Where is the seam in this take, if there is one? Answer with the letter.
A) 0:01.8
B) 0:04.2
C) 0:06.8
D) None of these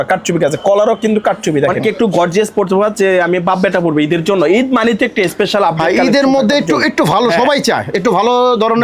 A